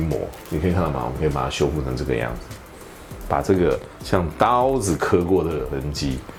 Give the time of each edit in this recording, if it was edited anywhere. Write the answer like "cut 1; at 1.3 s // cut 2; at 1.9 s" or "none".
none